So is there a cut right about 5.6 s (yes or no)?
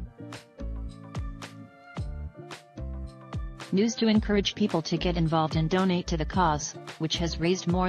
no